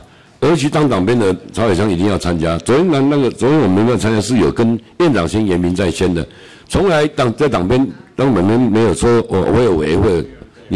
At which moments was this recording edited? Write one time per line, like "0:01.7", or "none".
none